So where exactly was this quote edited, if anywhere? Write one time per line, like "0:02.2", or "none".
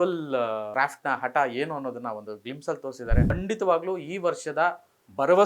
0:03.3